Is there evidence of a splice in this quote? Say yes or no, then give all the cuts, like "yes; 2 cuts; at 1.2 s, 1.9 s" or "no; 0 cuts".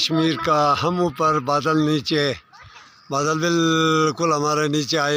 no; 0 cuts